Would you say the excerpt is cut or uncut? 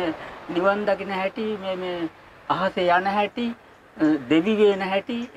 uncut